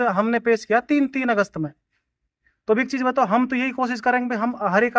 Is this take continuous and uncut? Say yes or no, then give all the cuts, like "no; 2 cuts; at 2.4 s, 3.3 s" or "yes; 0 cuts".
yes; 0 cuts